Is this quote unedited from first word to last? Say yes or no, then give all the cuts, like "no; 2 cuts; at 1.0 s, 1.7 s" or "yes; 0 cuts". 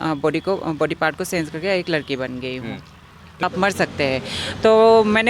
no; 1 cut; at 3.4 s